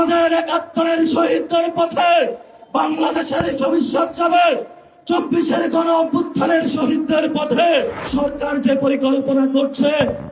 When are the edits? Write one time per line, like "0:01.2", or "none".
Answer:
0:08.0